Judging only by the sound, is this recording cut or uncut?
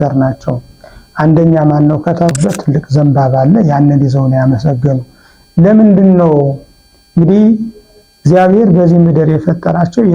cut